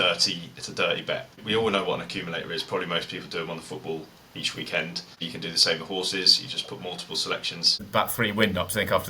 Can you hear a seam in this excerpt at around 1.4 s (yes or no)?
yes